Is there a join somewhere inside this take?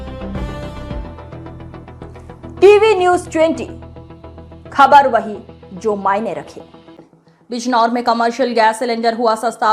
yes; 1 cut; at 7.2 s

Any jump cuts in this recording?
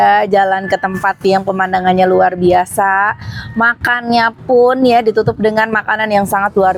no; 0 cuts

